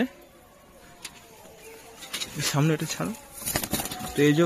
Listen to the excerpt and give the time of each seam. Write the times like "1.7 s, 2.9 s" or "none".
none